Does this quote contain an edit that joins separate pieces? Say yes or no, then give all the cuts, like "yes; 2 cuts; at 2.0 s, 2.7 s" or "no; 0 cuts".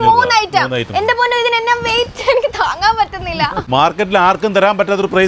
yes; 1 cut; at 3.7 s